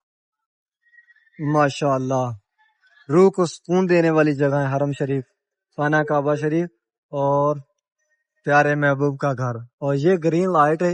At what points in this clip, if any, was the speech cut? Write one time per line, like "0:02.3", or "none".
none